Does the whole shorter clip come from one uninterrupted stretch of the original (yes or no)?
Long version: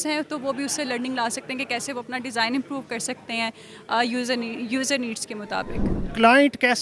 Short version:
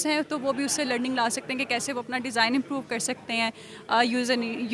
yes